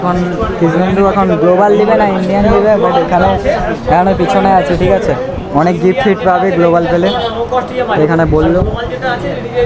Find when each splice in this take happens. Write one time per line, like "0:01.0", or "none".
none